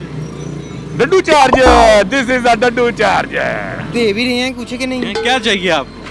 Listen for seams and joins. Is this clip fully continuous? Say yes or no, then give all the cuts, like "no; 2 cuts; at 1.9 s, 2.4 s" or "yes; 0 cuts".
no; 1 cut; at 3.9 s